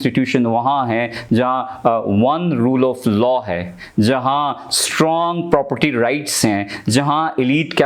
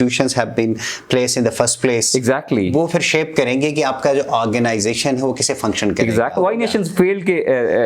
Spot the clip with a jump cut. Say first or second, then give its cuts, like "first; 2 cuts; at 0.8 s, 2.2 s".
second; 1 cut; at 6.3 s